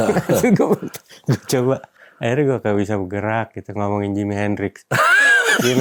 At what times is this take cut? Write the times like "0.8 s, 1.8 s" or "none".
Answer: 2.0 s

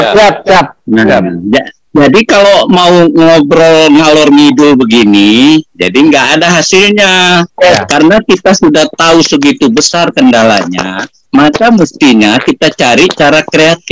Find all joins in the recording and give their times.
7.8 s

